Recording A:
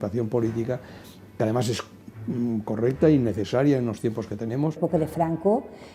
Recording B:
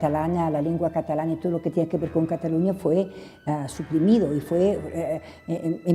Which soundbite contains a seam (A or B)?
A